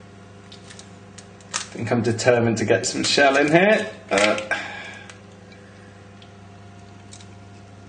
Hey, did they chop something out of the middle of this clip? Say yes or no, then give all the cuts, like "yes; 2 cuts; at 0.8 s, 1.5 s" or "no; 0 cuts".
yes; 1 cut; at 6.4 s